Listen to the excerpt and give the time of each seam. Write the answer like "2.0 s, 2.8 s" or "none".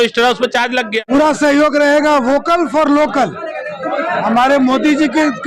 1.0 s